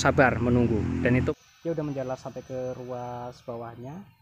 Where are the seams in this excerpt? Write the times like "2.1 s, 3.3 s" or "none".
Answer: 1.2 s